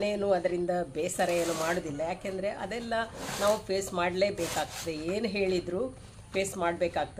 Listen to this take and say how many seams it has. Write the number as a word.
zero